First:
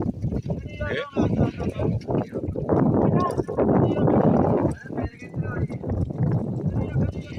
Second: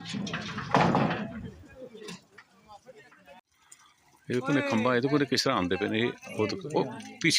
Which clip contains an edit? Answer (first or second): second